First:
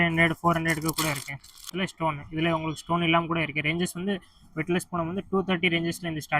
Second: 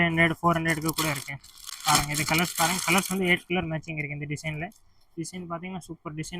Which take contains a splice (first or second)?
first